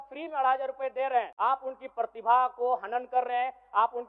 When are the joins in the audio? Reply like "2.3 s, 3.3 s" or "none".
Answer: 1.3 s